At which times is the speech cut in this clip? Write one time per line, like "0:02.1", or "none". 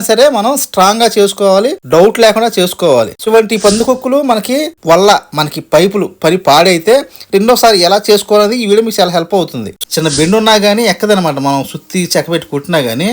0:03.2
0:09.6